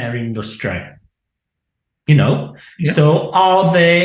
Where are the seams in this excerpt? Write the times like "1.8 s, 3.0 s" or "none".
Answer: none